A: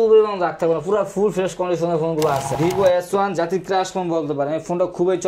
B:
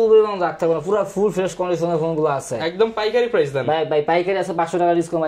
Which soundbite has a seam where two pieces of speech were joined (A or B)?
A